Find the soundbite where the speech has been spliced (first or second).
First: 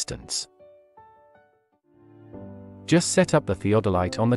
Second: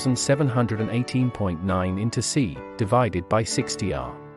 first